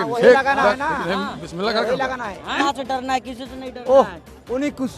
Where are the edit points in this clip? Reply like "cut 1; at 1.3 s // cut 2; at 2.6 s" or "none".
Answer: cut 1; at 2.6 s